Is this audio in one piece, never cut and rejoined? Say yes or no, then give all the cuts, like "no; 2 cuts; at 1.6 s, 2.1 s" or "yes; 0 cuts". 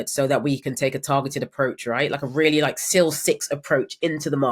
yes; 0 cuts